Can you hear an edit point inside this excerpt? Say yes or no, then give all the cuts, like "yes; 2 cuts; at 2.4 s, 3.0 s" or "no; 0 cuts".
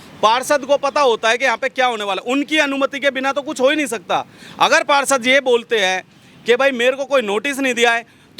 no; 0 cuts